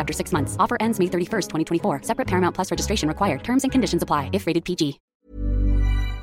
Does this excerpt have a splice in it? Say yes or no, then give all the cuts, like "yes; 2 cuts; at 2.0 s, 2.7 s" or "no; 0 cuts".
yes; 1 cut; at 5.1 s